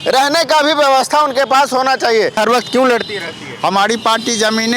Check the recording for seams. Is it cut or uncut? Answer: cut